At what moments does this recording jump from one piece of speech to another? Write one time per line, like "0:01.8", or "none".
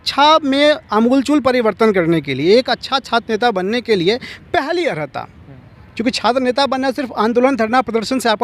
none